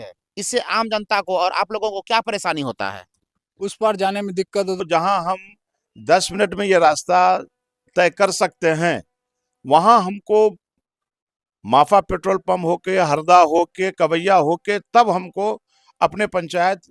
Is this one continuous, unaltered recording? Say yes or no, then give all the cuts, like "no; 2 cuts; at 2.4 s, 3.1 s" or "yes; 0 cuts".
no; 1 cut; at 4.8 s